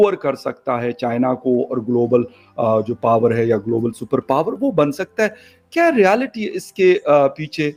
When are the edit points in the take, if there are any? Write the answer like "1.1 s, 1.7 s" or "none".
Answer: none